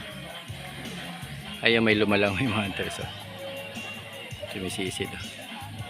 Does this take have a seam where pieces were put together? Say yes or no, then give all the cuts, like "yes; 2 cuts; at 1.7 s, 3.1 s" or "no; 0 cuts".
yes; 1 cut; at 1.4 s